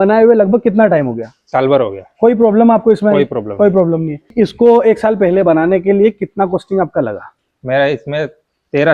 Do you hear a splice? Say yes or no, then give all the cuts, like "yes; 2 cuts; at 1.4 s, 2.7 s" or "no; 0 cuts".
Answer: yes; 1 cut; at 4.3 s